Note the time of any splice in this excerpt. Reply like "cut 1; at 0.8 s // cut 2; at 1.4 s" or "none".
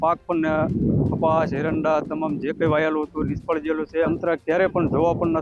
cut 1; at 4.1 s